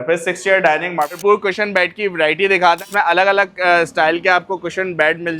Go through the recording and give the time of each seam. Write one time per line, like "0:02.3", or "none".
0:01.1
0:02.8